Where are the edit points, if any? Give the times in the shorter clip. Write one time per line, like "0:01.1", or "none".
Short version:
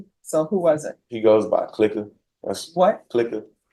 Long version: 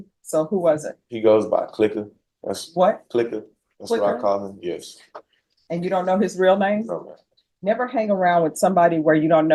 none